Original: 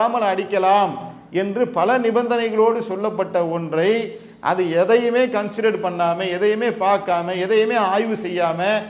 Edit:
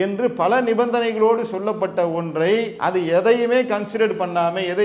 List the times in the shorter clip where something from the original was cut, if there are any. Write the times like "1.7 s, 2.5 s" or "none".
2.7 s